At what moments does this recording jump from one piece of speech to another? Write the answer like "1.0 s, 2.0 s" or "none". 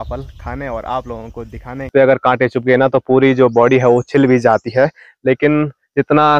1.9 s